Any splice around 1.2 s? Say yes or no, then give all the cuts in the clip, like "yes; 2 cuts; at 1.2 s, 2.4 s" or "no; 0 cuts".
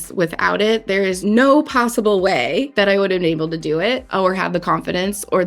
yes; 3 cuts; at 1.2 s, 2.7 s, 4.1 s